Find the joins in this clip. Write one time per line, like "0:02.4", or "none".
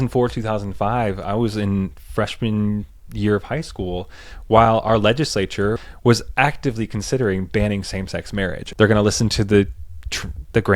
0:05.8
0:08.6